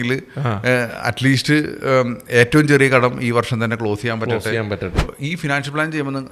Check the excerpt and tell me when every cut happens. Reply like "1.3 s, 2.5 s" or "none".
5.0 s